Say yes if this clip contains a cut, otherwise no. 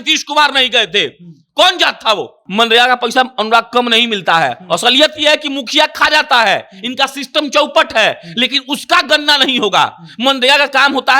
yes